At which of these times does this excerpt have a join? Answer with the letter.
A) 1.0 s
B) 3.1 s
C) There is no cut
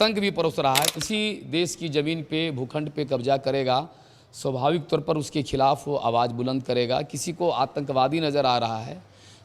A